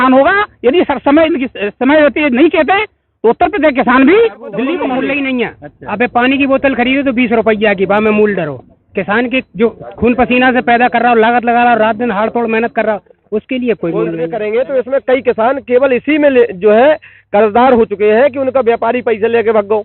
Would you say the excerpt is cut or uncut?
cut